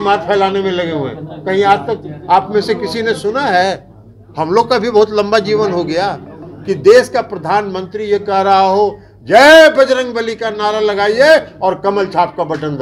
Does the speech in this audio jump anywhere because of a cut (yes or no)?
no